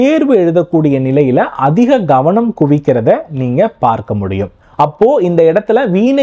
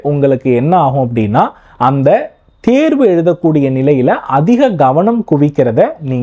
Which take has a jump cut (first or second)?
first